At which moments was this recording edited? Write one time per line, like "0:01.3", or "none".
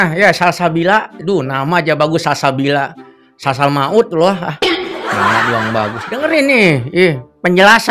none